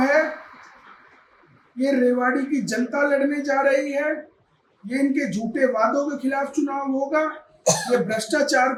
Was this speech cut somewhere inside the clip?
no; 0 cuts

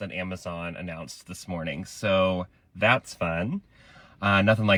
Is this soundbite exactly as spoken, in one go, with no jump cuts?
yes; 0 cuts

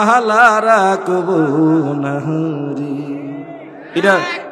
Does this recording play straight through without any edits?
yes; 0 cuts

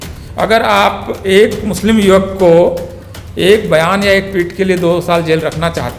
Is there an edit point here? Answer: no; 0 cuts

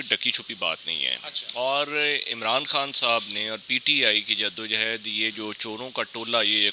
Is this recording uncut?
yes; 0 cuts

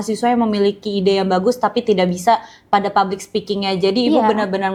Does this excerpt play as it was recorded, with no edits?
yes; 0 cuts

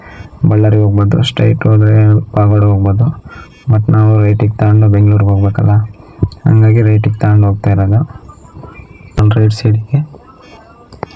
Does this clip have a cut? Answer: yes; 1 cut; at 9.2 s

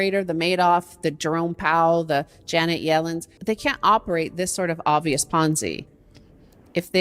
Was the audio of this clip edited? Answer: yes; 2 cuts; at 3.3 s, 5.8 s

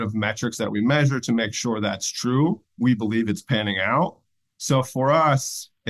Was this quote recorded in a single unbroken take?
no; 1 cut; at 2.7 s

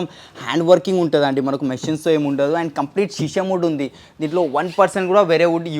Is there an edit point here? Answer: no; 0 cuts

